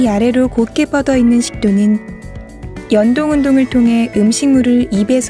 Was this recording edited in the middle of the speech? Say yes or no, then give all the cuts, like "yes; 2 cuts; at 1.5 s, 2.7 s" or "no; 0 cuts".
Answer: yes; 1 cut; at 3.4 s